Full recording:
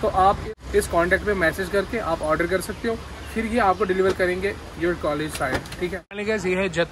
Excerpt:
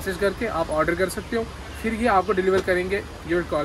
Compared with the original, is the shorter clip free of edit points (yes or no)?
yes